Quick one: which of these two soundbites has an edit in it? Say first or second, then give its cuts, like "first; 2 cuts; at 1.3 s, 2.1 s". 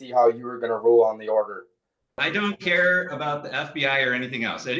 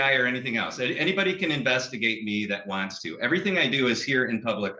first; 1 cut; at 2.3 s